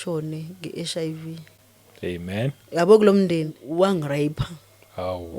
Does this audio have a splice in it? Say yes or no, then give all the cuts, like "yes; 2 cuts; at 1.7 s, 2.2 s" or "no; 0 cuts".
yes; 1 cut; at 3.6 s